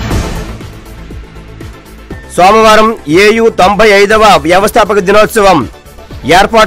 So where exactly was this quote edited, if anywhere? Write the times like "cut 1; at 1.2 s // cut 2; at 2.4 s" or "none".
cut 1; at 2.3 s